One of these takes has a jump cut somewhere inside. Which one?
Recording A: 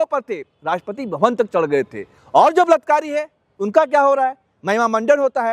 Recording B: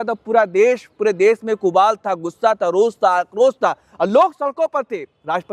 A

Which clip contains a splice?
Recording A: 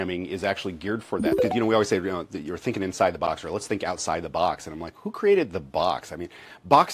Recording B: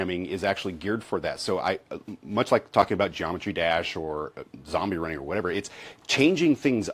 A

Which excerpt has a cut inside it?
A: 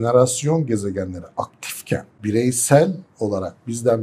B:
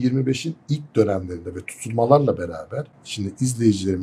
A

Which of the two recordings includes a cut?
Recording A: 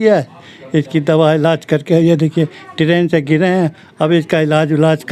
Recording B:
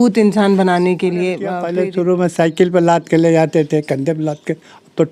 B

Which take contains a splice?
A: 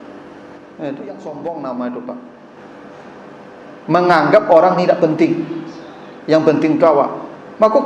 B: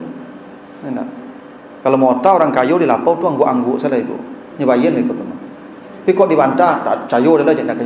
A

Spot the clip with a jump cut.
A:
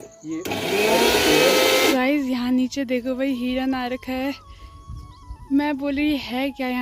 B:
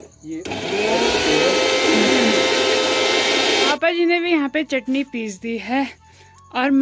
A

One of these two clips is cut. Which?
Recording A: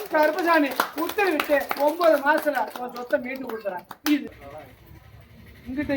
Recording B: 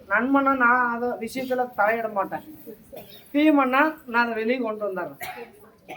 A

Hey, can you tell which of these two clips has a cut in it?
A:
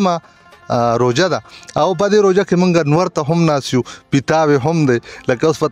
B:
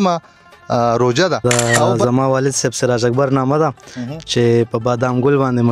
B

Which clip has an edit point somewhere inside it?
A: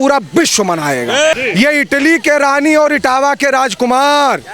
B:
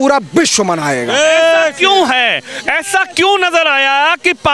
A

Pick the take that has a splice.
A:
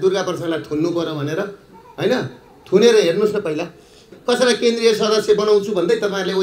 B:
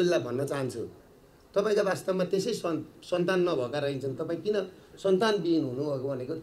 A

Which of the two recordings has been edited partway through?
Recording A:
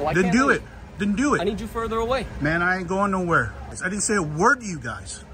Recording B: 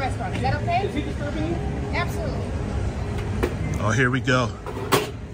A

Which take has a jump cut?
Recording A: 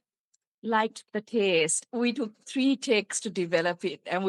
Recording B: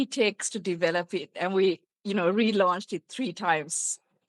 A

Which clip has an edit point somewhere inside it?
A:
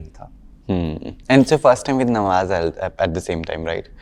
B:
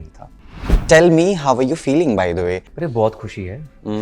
B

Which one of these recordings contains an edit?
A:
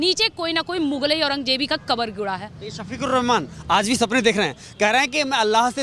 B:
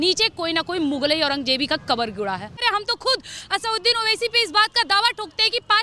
B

